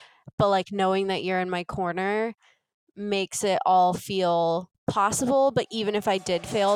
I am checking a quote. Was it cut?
yes; 1 cut; at 4.7 s

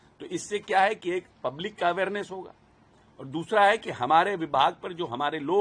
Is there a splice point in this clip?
no; 0 cuts

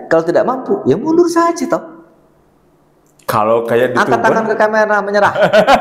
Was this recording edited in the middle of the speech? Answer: no; 0 cuts

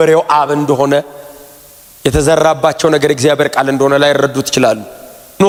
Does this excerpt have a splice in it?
no; 0 cuts

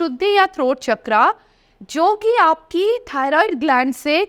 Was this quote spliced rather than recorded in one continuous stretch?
no; 0 cuts

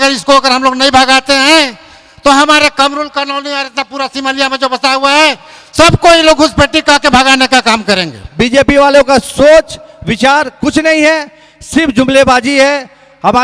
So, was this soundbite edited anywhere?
yes; 1 cut; at 8.2 s

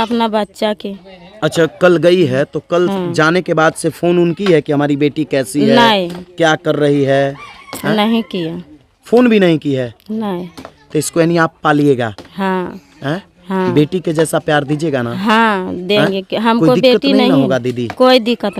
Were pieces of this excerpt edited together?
no; 0 cuts

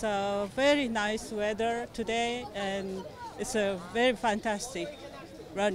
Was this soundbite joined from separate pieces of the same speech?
no; 0 cuts

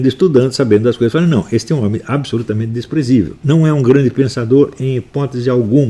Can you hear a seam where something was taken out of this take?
yes; 1 cut; at 3.4 s

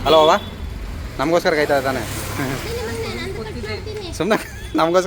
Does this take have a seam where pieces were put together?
no; 0 cuts

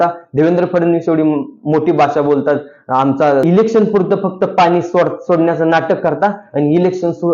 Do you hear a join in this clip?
yes; 1 cut; at 3.4 s

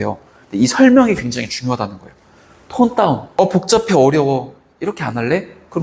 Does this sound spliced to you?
yes; 1 cut; at 3.3 s

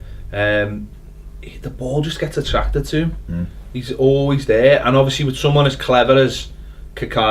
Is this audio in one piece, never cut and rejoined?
no; 1 cut; at 3.6 s

